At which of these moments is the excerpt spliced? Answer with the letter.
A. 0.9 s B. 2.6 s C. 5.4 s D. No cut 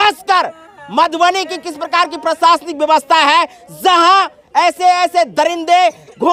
D